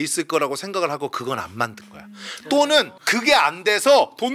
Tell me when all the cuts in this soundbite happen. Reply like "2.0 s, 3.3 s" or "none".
none